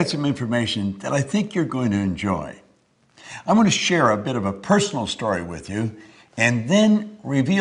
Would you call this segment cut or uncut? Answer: uncut